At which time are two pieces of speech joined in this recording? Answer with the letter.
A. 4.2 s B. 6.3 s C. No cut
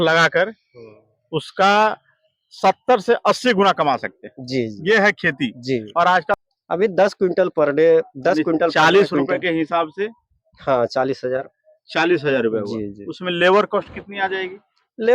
B